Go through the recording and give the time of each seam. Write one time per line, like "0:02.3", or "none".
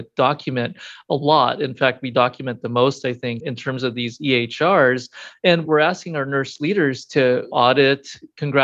0:03.4